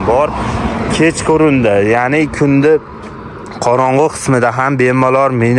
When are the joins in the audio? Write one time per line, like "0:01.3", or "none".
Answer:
none